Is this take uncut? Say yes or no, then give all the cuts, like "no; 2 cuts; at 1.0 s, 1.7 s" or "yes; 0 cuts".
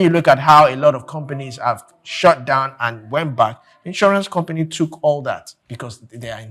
no; 1 cut; at 5.6 s